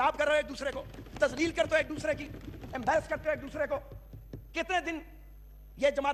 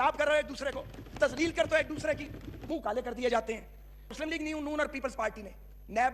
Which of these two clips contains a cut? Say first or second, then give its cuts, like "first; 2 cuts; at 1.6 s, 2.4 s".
second; 2 cuts; at 2.5 s, 4.1 s